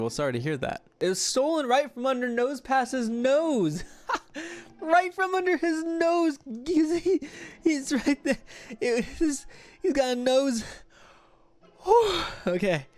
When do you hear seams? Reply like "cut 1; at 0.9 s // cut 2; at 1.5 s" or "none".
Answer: cut 1; at 0.9 s

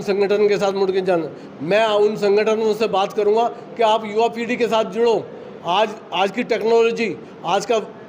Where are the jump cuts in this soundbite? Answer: none

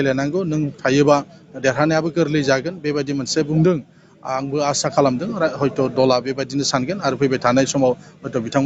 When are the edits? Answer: none

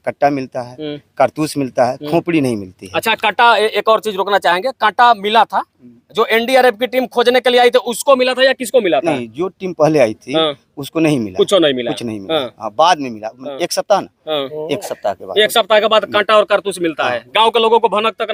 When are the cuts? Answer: none

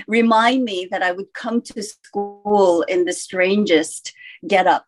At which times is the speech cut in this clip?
none

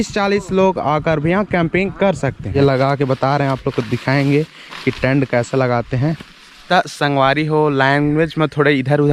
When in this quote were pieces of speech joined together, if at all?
cut 1; at 2.6 s // cut 2; at 6.5 s

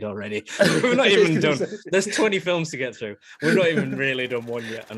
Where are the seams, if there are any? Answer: none

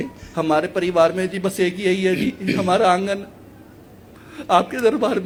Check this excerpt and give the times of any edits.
none

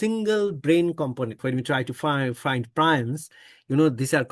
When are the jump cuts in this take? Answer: cut 1; at 1.3 s

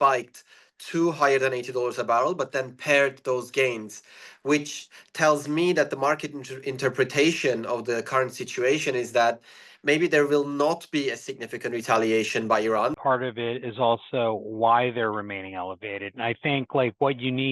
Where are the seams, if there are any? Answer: cut 1; at 13.0 s

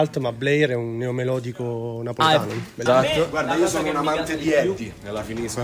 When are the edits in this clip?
cut 1; at 2.8 s

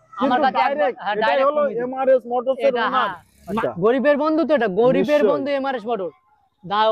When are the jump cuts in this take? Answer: cut 1; at 3.5 s

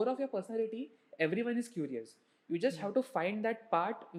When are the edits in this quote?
none

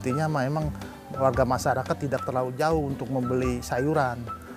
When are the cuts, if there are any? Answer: none

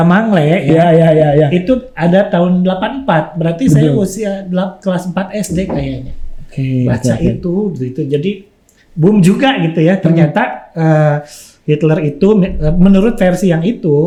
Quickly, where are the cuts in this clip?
none

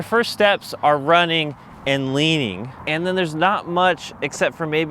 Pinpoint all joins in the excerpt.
cut 1; at 2.7 s

